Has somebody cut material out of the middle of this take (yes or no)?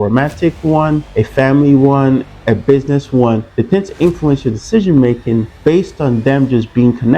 yes